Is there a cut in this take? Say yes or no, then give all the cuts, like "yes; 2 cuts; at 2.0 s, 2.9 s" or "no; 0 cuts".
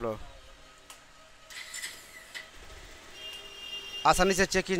no; 0 cuts